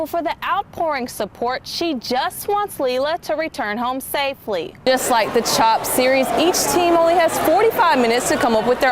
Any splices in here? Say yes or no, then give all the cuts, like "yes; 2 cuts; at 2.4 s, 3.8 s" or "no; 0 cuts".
yes; 1 cut; at 4.8 s